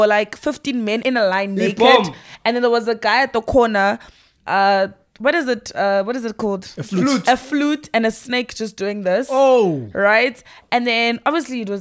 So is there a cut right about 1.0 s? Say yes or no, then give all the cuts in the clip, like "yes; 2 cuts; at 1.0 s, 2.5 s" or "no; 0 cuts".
yes; 1 cut; at 1.0 s